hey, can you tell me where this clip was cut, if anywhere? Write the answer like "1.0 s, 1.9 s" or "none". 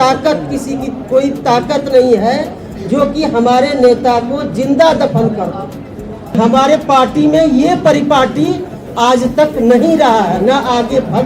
6.3 s